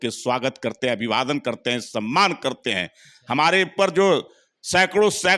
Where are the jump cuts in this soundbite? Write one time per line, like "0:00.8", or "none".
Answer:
none